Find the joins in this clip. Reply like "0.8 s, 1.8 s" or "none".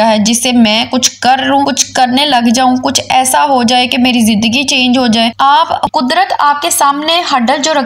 5.9 s

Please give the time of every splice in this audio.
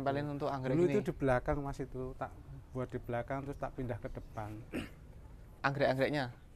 none

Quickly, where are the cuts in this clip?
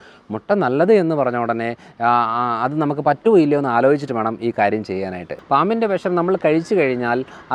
5.3 s

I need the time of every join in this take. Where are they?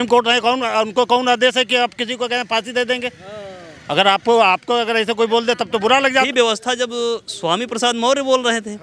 6.3 s

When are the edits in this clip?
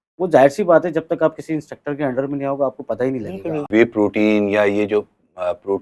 3.7 s

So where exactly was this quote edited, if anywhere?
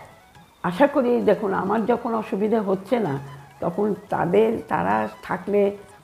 none

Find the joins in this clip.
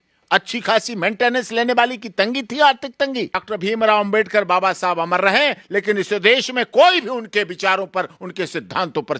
3.4 s

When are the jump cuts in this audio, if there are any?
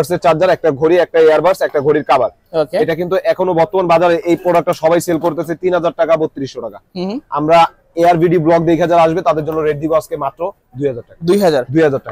none

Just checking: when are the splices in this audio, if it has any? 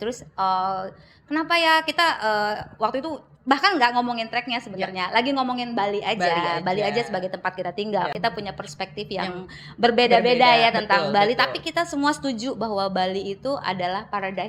8.1 s

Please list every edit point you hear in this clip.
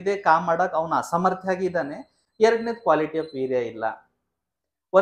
none

